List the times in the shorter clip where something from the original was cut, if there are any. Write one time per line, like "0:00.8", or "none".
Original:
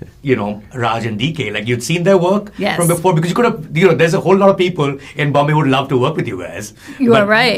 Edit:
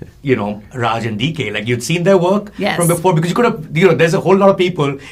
none